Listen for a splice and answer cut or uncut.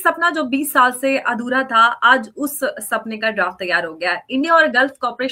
uncut